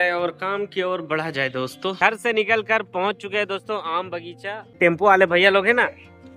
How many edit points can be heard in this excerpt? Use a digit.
2